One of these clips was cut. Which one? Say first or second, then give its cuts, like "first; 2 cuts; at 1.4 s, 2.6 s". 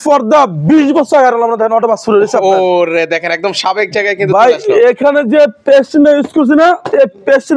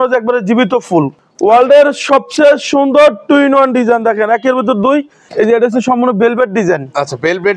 second; 2 cuts; at 1.2 s, 5.3 s